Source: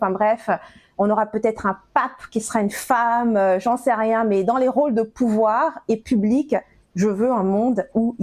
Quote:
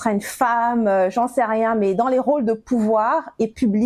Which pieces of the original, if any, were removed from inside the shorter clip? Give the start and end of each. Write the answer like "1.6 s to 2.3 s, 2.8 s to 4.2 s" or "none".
none